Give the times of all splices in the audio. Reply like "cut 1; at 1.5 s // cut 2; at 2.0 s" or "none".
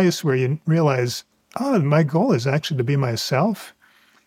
none